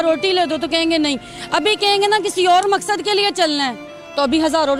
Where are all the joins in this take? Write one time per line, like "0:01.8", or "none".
none